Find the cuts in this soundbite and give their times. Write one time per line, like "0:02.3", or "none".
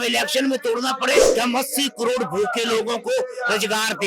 0:01.2